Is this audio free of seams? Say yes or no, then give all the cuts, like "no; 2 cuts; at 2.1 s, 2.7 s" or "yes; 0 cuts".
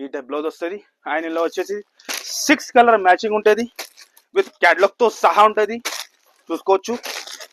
yes; 0 cuts